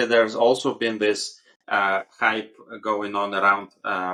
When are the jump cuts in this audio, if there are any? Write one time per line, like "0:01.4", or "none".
none